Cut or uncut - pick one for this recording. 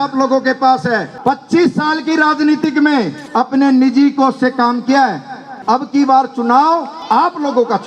cut